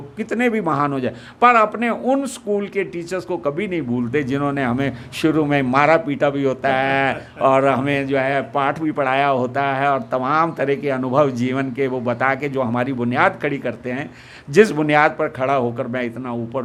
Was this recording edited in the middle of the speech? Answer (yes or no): no